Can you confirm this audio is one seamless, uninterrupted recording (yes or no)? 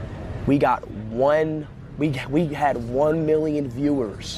yes